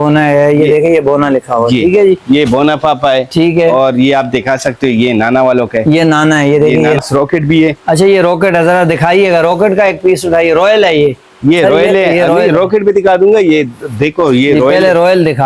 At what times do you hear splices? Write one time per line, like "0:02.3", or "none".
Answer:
0:07.0